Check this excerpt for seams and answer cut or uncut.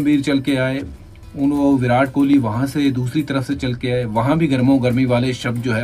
uncut